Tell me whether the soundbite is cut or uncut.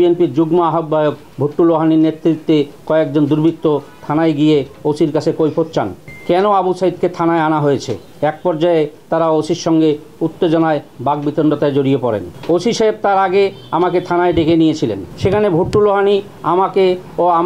uncut